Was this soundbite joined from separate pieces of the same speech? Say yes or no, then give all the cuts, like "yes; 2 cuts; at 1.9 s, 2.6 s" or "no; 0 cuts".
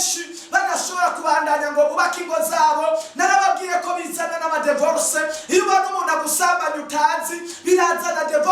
no; 0 cuts